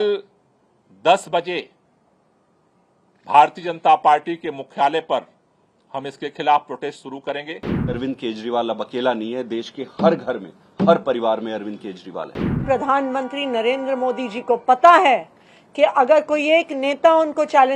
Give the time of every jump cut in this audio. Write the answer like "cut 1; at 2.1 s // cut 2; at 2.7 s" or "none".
cut 1; at 7.7 s // cut 2; at 12.5 s

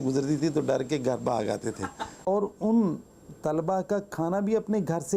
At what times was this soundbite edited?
cut 1; at 2.3 s

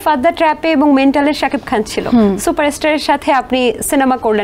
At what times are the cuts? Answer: none

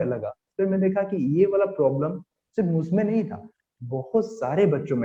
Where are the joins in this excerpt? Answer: none

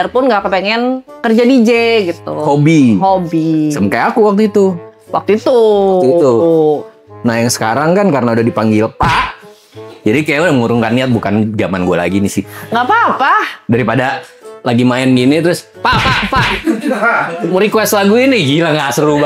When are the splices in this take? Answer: none

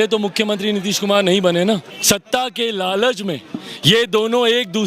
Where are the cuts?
cut 1; at 1.9 s

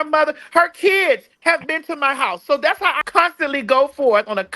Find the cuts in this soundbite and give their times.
cut 1; at 3.0 s

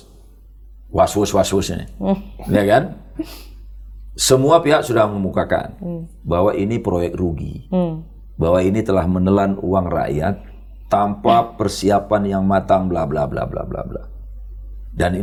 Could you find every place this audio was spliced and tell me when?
none

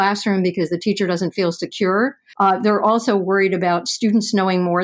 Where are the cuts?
cut 1; at 2.2 s

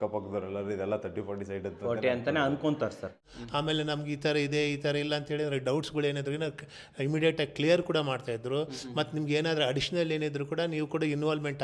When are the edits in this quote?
cut 1; at 3.3 s

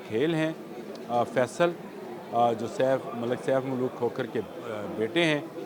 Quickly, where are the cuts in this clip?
none

